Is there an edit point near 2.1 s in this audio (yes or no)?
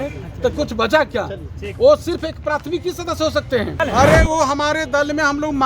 no